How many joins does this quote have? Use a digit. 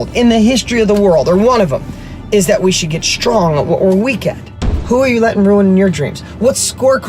1